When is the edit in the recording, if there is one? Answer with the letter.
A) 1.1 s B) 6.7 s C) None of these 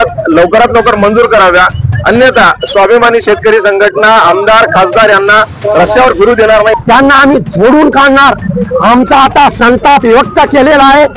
B